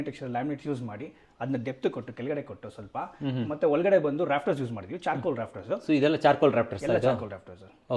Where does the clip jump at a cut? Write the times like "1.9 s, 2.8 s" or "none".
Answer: none